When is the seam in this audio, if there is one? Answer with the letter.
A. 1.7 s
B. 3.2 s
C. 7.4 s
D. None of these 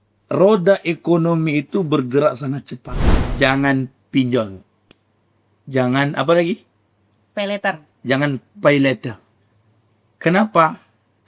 B